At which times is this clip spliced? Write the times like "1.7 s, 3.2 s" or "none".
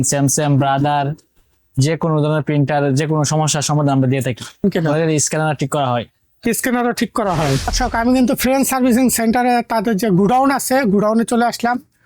4.6 s, 7.7 s